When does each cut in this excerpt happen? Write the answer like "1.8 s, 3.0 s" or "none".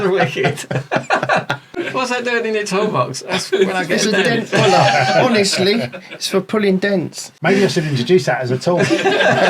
1.8 s, 7.2 s

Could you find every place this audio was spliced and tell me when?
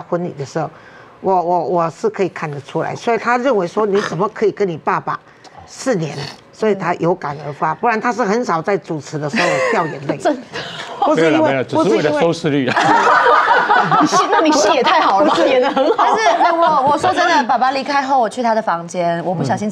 none

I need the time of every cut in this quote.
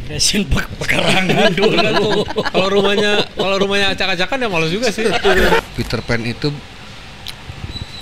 5.6 s

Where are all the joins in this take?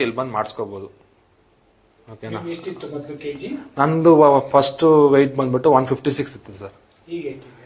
6.5 s

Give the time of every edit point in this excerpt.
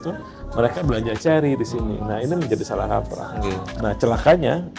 3.7 s

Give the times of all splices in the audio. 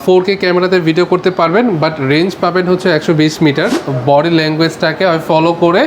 3.9 s

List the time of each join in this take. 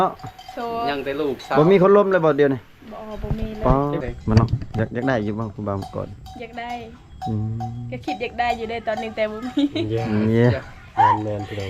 4.0 s

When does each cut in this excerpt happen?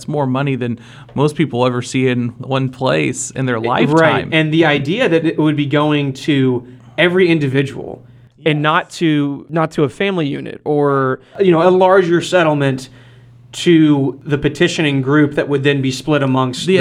9.4 s, 14.2 s

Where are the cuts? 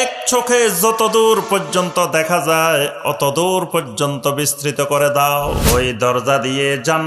5.6 s

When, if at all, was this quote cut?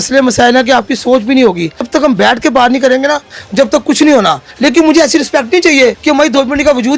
1.8 s, 4.5 s, 6.0 s

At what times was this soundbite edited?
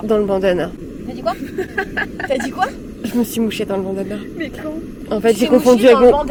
none

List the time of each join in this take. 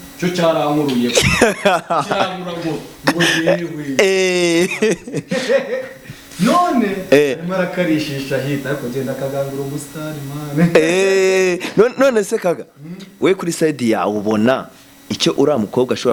none

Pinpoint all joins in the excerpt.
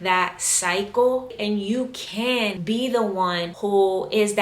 2.6 s, 3.5 s

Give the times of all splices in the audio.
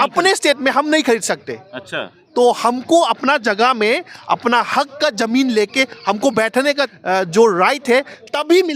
7.0 s

